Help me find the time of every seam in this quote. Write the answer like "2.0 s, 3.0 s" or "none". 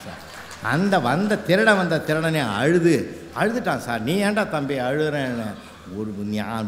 none

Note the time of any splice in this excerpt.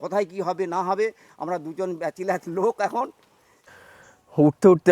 3.5 s

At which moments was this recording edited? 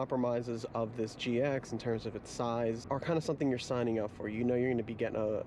2.8 s

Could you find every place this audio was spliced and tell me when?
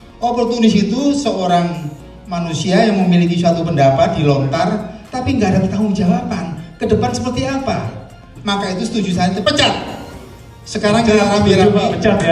8.3 s, 9.4 s

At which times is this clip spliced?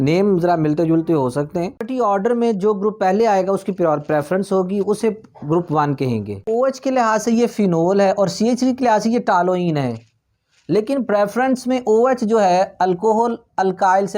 1.9 s, 6.4 s

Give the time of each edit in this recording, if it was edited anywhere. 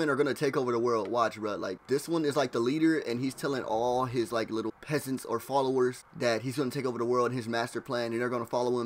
none

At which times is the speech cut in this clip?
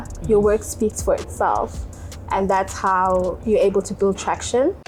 none

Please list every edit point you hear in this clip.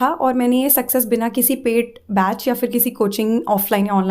none

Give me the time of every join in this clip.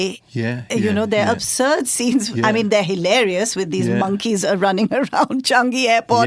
none

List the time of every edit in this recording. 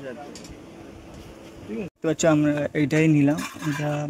1.9 s

